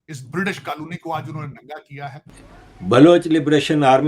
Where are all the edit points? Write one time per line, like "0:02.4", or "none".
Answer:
0:02.3